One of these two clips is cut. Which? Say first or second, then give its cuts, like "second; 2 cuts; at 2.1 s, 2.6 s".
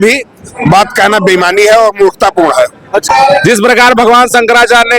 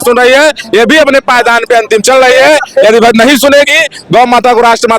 first; 1 cut; at 3.1 s